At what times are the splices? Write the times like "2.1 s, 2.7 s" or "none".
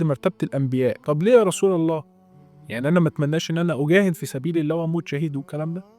1.0 s